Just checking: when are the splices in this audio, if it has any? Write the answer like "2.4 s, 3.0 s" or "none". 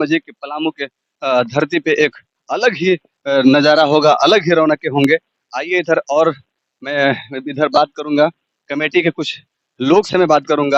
none